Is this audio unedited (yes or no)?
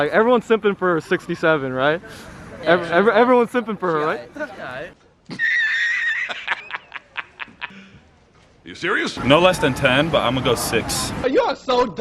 no